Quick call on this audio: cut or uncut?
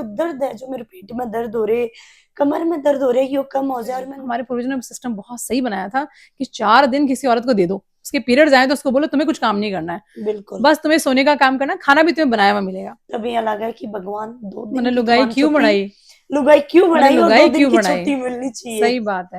cut